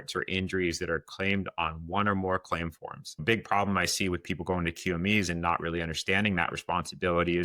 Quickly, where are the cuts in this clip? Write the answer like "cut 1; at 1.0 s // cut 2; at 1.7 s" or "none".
cut 1; at 3.2 s